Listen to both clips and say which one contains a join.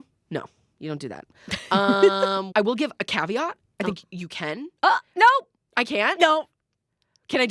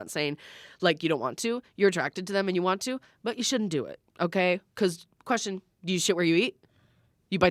first; 1 cut; at 2.5 s

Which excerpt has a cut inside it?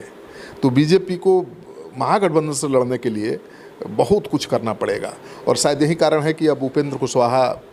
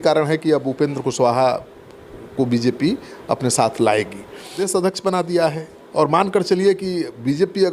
second; 1 cut; at 4.6 s

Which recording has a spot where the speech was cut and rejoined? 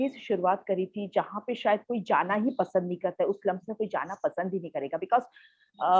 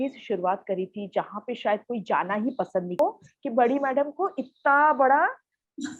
second; 1 cut; at 3.0 s

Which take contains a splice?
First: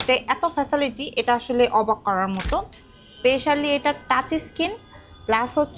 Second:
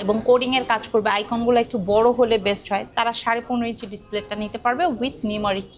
first; 1 cut; at 2.8 s

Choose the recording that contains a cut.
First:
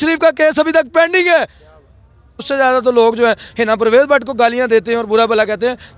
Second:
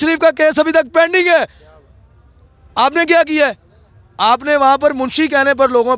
first; 1 cut; at 2.4 s

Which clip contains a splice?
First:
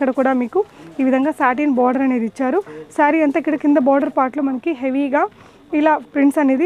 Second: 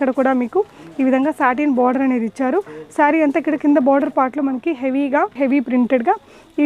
second; 1 cut; at 5.3 s

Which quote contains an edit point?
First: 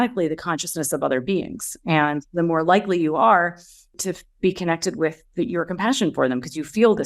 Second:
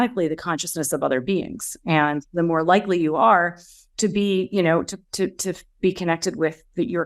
first; 1 cut; at 3.9 s

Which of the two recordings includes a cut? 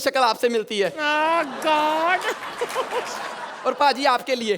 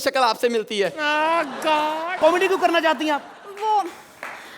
second; 1 cut; at 2.1 s

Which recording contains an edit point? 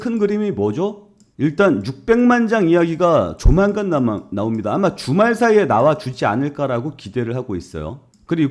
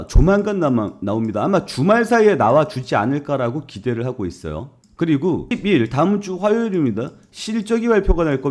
first; 1 cut; at 1.2 s

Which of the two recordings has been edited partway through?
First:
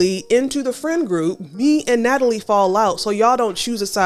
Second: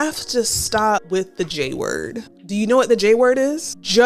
second; 1 cut; at 1.0 s

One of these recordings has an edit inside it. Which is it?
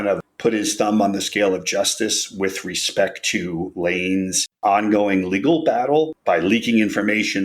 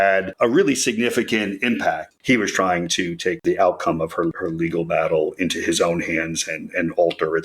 second; 2 cuts; at 2.1 s, 3.4 s

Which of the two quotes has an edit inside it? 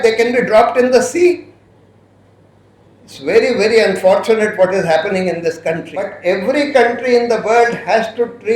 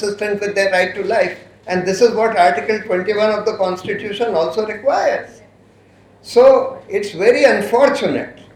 first; 1 cut; at 6.1 s

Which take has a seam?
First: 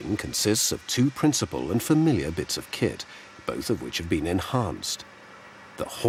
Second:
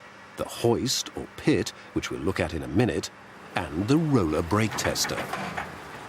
second; 1 cut; at 5.1 s

